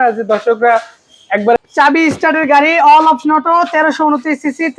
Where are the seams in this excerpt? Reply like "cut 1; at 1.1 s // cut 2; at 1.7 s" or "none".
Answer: cut 1; at 1.6 s

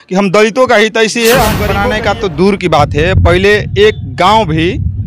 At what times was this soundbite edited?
cut 1; at 1.7 s

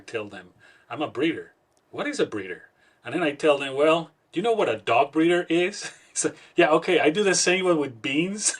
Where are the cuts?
none

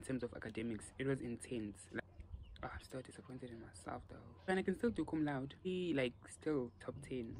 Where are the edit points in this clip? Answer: cut 1; at 2.0 s // cut 2; at 4.4 s // cut 3; at 5.7 s

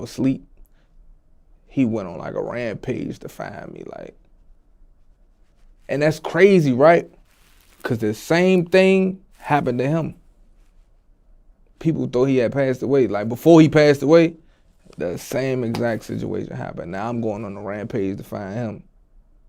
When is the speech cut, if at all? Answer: none

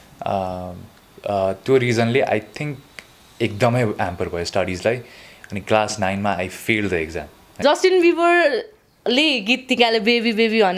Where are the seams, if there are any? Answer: cut 1; at 7.6 s

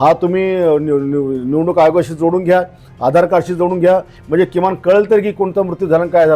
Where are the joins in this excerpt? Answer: none

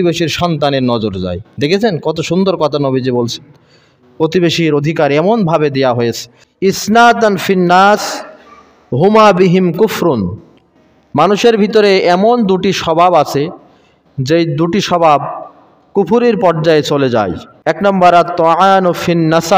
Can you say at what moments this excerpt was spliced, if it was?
cut 1; at 6.2 s // cut 2; at 17.8 s

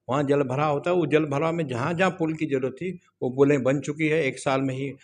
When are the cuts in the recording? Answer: none

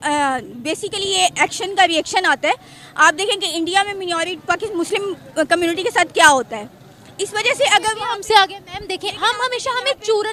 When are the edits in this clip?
none

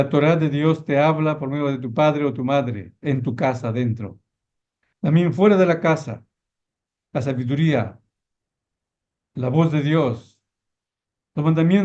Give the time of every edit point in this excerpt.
none

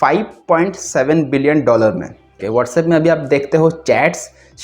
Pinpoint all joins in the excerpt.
cut 1; at 2.4 s

